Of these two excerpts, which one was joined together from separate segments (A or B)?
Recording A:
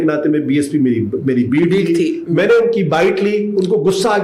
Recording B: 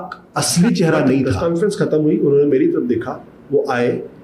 B